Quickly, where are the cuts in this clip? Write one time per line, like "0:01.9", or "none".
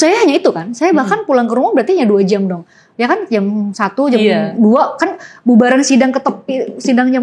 none